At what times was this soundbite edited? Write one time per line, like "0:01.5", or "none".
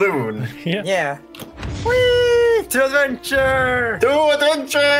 none